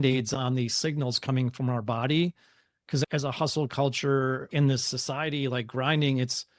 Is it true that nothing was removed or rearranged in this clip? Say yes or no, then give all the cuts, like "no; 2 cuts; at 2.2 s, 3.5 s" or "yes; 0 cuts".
yes; 0 cuts